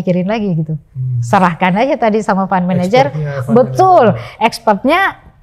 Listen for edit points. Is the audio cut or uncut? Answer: uncut